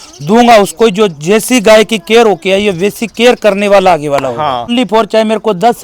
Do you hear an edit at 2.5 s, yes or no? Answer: no